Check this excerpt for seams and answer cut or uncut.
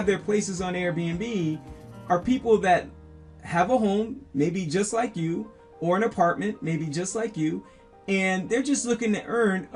uncut